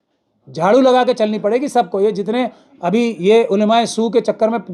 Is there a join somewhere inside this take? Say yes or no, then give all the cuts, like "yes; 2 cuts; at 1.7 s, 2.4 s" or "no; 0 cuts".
no; 0 cuts